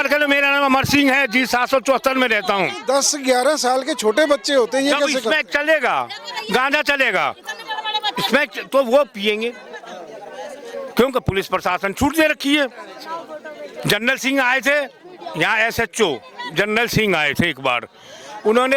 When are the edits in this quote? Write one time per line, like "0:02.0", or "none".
none